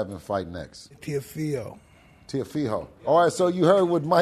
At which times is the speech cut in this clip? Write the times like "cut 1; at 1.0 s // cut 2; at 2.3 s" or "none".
cut 1; at 1.0 s // cut 2; at 3.1 s